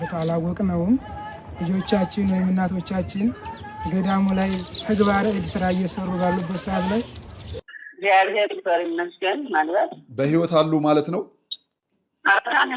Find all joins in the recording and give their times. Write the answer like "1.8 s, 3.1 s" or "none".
7.5 s